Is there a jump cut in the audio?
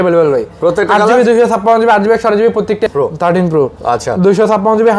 yes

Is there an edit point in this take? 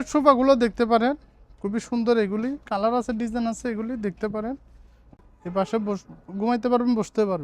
yes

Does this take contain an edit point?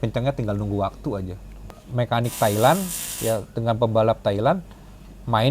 yes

